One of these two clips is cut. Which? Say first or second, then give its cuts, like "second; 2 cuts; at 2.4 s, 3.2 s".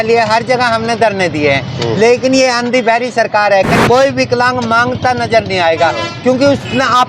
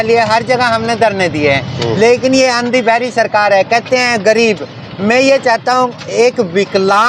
first; 1 cut; at 3.8 s